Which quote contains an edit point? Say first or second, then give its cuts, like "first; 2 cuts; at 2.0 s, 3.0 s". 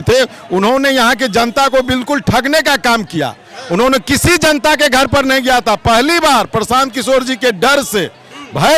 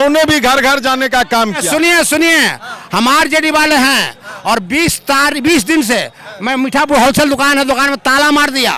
second; 1 cut; at 1.6 s